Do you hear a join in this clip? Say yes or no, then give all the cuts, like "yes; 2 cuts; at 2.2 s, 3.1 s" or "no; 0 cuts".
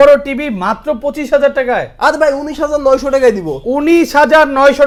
no; 0 cuts